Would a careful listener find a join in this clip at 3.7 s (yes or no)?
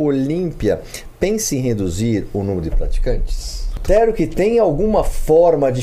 yes